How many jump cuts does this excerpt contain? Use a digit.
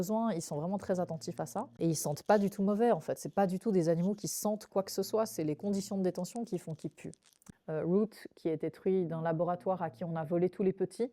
2